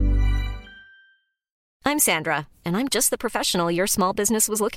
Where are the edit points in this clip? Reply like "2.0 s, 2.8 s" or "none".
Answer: 1.6 s